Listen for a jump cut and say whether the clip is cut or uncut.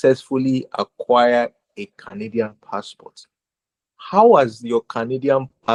uncut